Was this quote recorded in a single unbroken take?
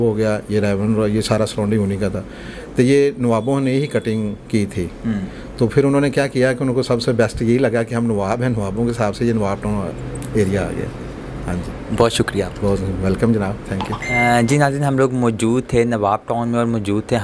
yes; 0 cuts

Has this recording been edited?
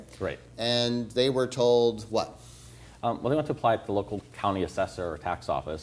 no; 0 cuts

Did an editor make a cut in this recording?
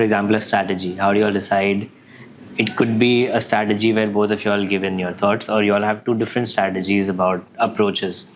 no; 0 cuts

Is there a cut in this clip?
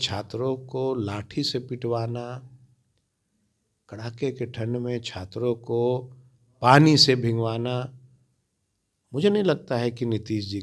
no; 0 cuts

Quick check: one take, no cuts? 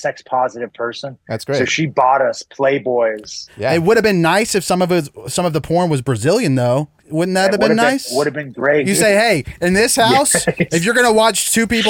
no; 3 cuts; at 3.5 s, 7.0 s, 8.8 s

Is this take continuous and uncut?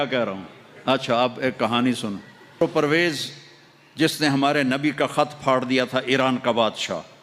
no; 1 cut; at 2.6 s

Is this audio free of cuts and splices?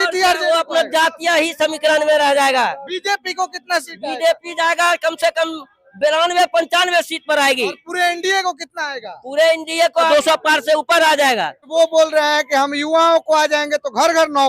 no; 2 cuts; at 10.1 s, 11.7 s

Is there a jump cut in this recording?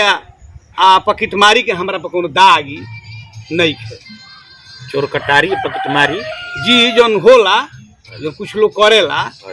no; 0 cuts

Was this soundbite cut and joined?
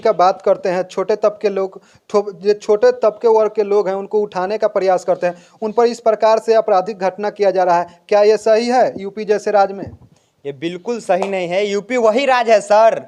no; 0 cuts

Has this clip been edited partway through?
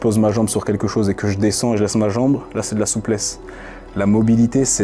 no; 0 cuts

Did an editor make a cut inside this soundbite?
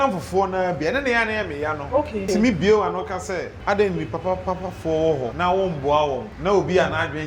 yes; 4 cuts; at 2.2 s, 3.5 s, 5.3 s, 6.3 s

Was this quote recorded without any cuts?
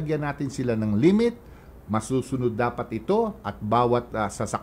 yes; 0 cuts

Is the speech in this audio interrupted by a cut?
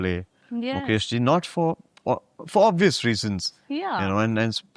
no; 0 cuts

